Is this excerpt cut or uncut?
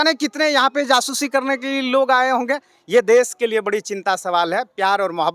uncut